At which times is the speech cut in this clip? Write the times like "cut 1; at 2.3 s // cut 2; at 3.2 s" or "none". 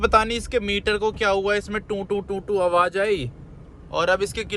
none